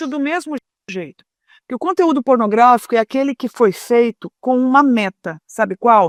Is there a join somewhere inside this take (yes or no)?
no